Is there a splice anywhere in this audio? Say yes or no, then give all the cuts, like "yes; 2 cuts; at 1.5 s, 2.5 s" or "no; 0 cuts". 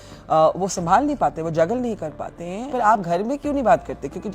yes; 1 cut; at 2.7 s